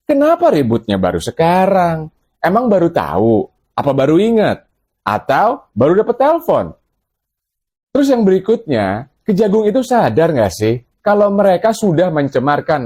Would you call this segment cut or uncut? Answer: uncut